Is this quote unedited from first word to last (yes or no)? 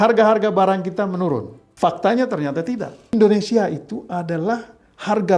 no